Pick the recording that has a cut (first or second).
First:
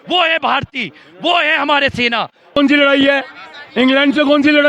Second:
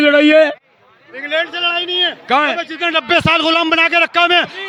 first